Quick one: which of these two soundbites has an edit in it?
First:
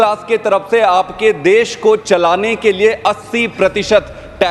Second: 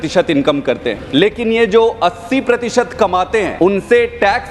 second; 2 cuts; at 1.0 s, 3.5 s

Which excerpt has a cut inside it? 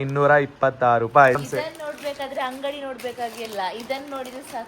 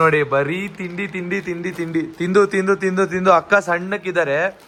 first; 1 cut; at 1.4 s

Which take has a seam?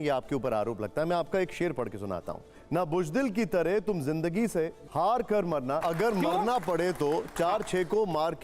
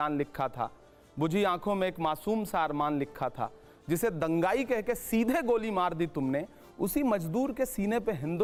first; 3 cuts; at 2.6 s, 4.8 s, 5.8 s

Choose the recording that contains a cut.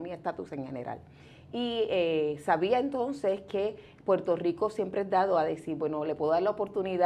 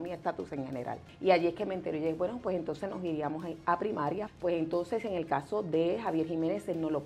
second; 2 cuts; at 1.1 s, 4.3 s

